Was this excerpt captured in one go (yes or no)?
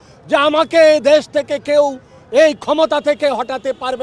yes